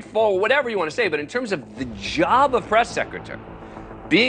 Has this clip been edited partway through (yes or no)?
no